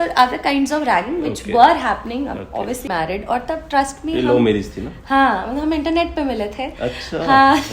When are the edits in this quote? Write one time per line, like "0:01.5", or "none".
0:02.8